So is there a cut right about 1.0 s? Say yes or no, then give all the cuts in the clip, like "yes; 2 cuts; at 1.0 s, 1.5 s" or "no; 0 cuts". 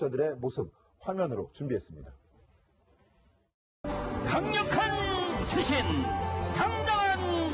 yes; 1 cut; at 1.0 s